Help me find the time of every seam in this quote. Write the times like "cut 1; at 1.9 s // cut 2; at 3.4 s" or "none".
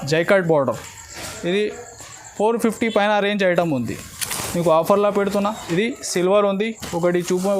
cut 1; at 5.6 s